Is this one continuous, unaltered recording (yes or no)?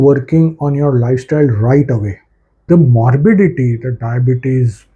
no